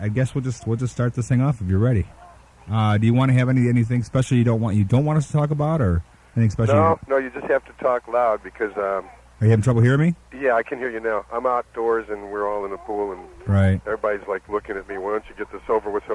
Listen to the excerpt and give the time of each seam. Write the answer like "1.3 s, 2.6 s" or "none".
13.8 s